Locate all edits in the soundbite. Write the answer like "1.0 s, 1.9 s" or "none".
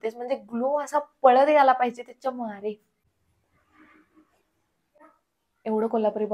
3.2 s

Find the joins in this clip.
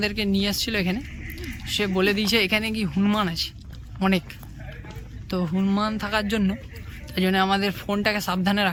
none

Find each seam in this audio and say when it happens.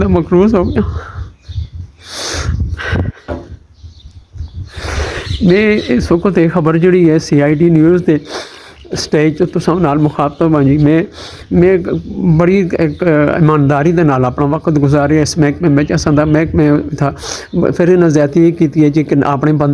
none

